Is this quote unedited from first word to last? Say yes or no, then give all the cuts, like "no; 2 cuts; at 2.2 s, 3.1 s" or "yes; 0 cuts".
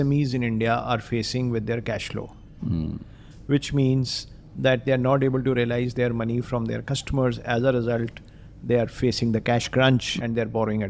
yes; 0 cuts